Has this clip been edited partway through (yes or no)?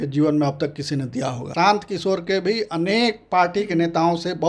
yes